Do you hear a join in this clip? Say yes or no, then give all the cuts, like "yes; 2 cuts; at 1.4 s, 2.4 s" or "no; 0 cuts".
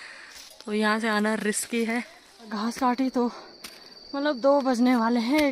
yes; 1 cut; at 2.5 s